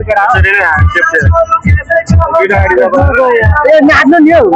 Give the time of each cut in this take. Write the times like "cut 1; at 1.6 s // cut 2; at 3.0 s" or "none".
none